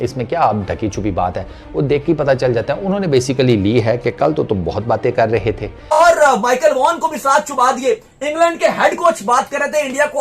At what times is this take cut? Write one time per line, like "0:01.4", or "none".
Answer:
0:06.0